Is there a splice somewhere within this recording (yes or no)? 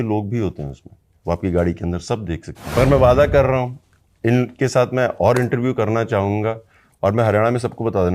yes